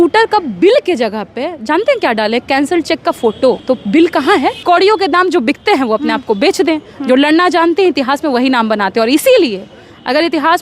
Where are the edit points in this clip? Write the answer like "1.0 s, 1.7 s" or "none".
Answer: 3.6 s, 4.6 s